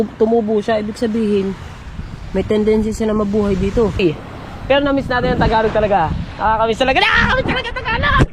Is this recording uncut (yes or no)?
no